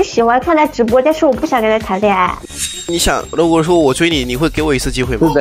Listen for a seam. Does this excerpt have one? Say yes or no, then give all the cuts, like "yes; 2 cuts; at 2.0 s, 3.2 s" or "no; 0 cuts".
no; 0 cuts